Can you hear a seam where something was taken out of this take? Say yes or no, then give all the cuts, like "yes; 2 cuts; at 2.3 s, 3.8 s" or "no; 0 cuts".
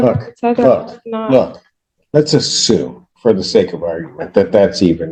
no; 0 cuts